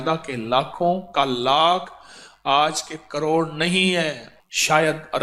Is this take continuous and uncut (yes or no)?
no